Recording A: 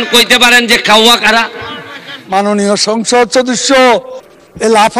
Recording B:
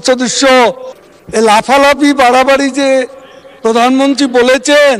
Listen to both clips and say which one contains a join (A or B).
A